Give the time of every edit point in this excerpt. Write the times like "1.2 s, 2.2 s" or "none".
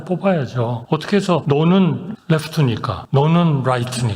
1.2 s, 3.0 s